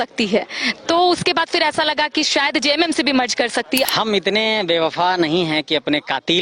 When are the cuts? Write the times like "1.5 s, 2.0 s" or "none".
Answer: 3.9 s